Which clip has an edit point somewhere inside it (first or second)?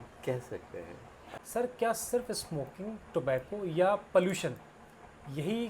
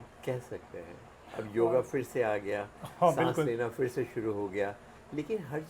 first